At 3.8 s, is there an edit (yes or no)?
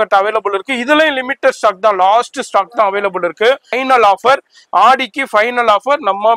yes